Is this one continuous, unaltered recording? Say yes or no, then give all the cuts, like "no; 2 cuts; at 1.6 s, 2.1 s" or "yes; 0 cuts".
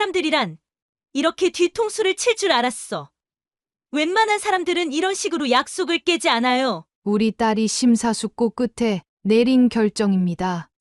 no; 1 cut; at 6.9 s